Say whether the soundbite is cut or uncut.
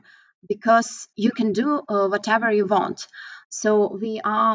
cut